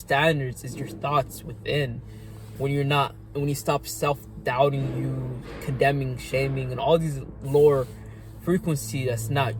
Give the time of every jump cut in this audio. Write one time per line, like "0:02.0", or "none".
none

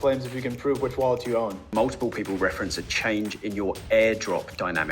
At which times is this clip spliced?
0:01.6

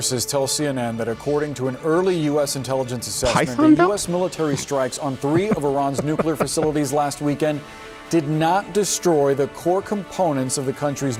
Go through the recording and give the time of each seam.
none

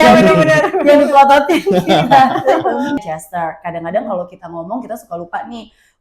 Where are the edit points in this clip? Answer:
0:03.0

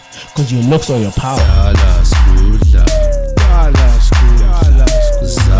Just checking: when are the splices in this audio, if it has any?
0:01.5

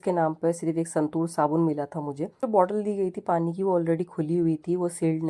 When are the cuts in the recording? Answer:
0:02.4

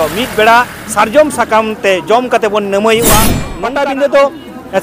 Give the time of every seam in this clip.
0:03.5

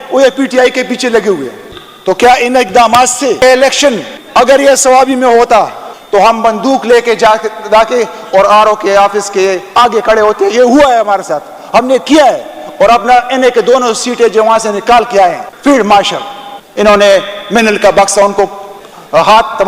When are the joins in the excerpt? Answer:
0:03.4
0:15.4

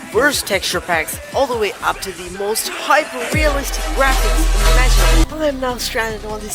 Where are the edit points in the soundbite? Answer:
0:05.3

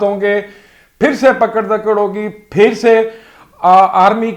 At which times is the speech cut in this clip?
none

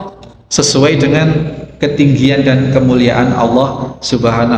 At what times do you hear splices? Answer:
none

